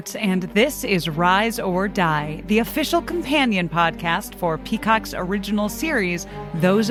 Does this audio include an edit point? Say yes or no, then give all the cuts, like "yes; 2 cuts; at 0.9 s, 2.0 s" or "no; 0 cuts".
no; 0 cuts